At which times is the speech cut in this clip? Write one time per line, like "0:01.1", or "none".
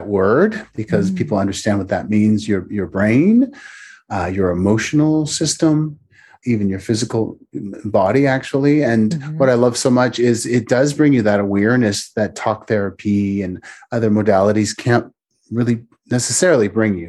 0:06.4